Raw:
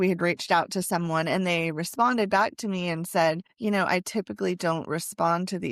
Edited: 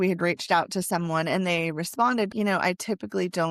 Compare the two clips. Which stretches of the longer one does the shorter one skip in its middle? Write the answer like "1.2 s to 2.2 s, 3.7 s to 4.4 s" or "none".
2.3 s to 3.6 s